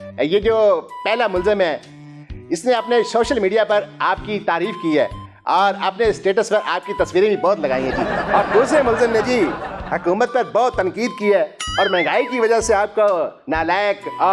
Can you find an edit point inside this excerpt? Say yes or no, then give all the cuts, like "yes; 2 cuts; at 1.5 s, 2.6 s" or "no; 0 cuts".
no; 0 cuts